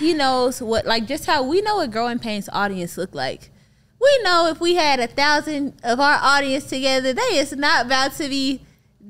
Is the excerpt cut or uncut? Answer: uncut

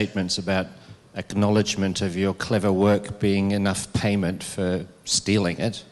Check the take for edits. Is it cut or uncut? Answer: uncut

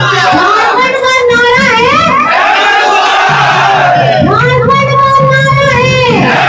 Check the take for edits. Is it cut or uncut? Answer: uncut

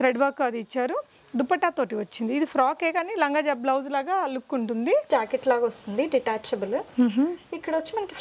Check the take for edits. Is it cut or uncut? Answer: cut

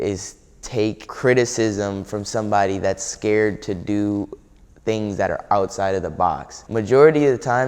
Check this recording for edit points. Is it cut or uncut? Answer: cut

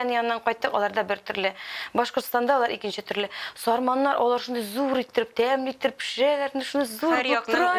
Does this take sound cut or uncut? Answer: uncut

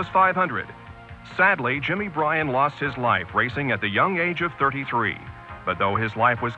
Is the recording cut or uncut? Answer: uncut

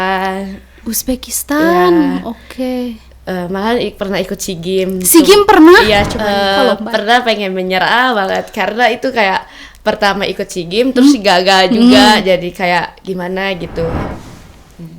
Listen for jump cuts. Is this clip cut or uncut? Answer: cut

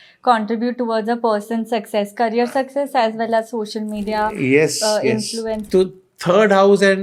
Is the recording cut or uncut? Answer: uncut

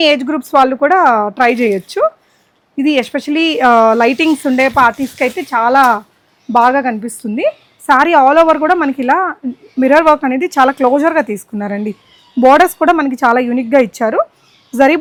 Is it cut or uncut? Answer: uncut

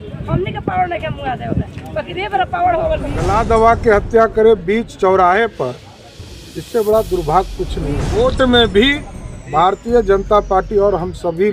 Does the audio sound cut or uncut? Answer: cut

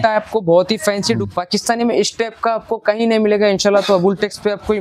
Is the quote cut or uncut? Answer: cut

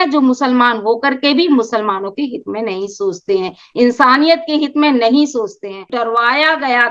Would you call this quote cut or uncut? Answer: cut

